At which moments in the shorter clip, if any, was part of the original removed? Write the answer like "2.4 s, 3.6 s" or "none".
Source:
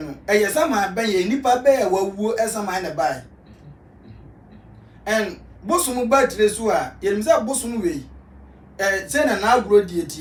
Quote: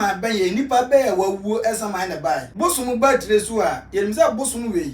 2.5 s